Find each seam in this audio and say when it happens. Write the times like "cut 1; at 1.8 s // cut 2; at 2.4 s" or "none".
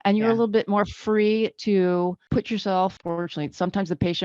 cut 1; at 2.2 s // cut 2; at 3.0 s